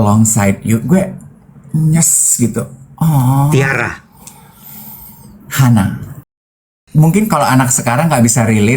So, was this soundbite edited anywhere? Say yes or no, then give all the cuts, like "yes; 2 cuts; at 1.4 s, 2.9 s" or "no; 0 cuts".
yes; 1 cut; at 6.8 s